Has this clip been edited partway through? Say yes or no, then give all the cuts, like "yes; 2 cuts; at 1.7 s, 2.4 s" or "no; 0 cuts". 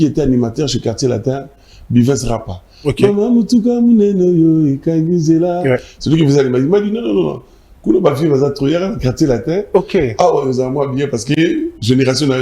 no; 0 cuts